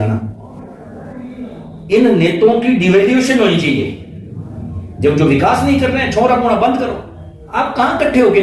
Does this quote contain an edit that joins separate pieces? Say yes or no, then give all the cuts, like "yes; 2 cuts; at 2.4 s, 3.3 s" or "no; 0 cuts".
no; 0 cuts